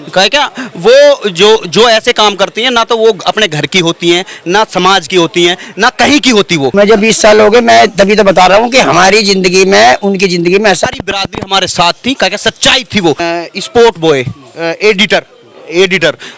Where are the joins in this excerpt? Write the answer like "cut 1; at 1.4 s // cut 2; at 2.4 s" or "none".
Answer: cut 1; at 6.7 s // cut 2; at 10.8 s // cut 3; at 13.2 s